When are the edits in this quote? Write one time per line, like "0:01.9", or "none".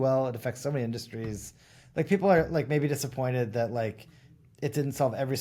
none